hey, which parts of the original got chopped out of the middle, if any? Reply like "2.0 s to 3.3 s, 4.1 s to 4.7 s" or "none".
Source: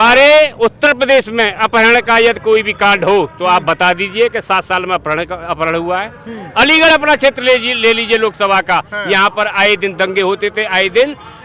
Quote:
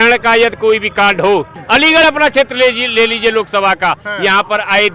3.3 s to 6.4 s